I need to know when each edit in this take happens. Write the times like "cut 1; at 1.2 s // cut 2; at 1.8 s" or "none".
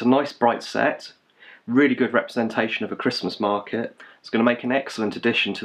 none